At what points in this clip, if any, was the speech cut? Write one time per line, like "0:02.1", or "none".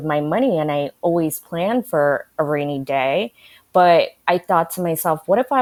none